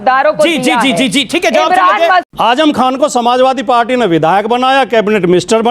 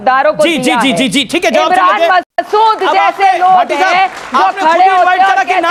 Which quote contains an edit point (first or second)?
first